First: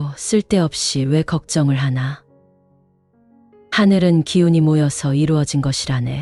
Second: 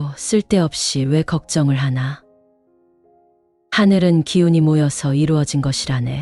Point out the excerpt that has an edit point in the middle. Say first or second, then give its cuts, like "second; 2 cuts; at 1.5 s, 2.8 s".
second; 2 cuts; at 2.2 s, 3.7 s